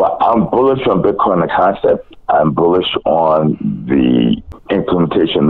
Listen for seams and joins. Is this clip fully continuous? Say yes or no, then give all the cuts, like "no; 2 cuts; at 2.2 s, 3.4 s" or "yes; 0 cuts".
no; 1 cut; at 4.5 s